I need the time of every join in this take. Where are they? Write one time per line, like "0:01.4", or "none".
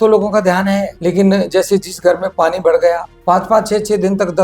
0:00.9
0:03.1